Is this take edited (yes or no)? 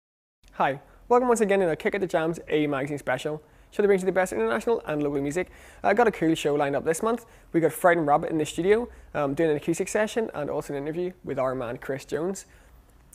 no